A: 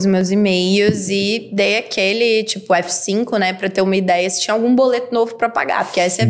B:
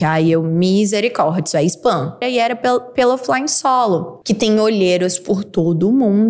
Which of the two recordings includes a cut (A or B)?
B